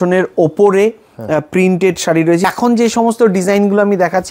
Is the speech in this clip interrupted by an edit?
yes; 1 cut; at 2.4 s

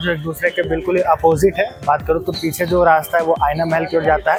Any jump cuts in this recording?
no; 0 cuts

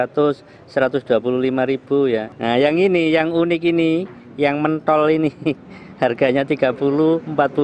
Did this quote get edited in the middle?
yes; 1 cut; at 2.3 s

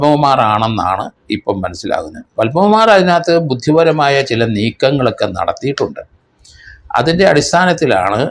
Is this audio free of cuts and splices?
yes; 0 cuts

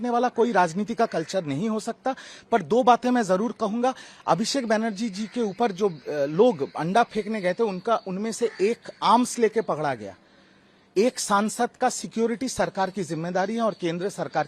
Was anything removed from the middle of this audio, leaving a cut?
no; 0 cuts

